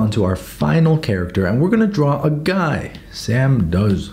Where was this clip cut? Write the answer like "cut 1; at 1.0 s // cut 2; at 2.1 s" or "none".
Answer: none

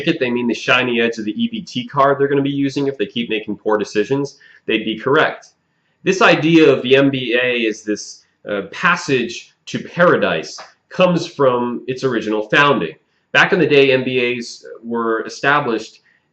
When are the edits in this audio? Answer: cut 1; at 3.3 s

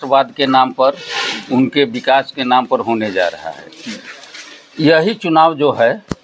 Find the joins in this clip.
none

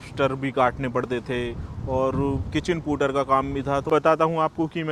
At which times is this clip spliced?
cut 1; at 3.8 s

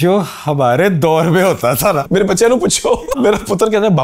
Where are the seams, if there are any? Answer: cut 1; at 2.1 s // cut 2; at 3.1 s

